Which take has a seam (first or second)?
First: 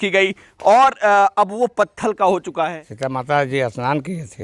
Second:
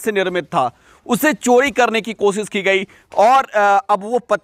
first